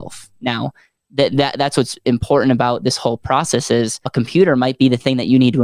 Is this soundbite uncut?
no; 1 cut; at 4.0 s

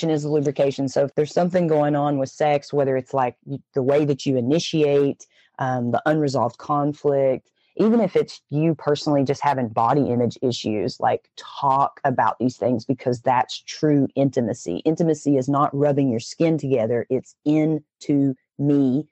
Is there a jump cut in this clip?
yes; 1 cut; at 1.1 s

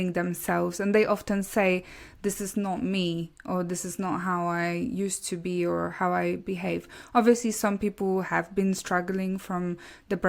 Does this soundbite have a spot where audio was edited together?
no; 0 cuts

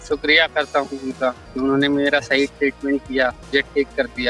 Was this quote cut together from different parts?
yes; 2 cuts; at 1.4 s, 3.4 s

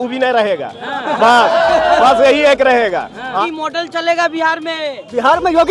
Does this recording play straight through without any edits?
no; 1 cut; at 3.4 s

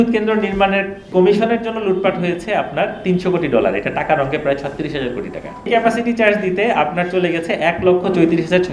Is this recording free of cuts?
no; 2 cuts; at 1.0 s, 5.7 s

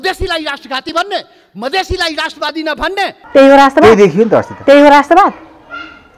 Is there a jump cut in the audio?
yes; 1 cut; at 3.1 s

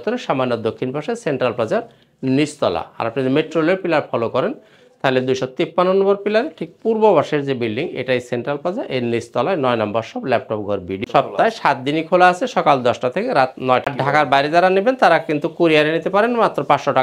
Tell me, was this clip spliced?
yes; 2 cuts; at 11.0 s, 13.8 s

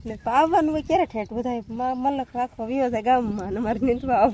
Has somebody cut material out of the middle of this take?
no; 0 cuts

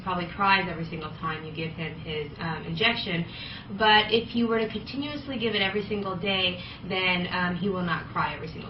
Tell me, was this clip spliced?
no; 0 cuts

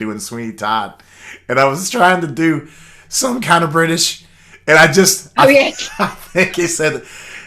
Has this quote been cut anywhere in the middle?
no; 0 cuts

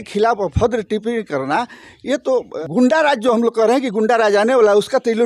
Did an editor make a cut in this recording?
yes; 1 cut; at 2.5 s

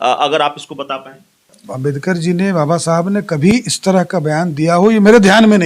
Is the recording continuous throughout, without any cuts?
no; 1 cut; at 1.7 s

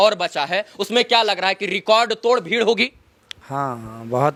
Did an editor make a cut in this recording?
no; 0 cuts

